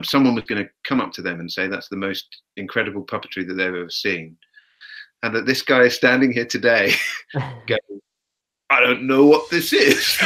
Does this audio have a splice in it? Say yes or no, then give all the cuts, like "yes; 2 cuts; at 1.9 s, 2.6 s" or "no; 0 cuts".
no; 0 cuts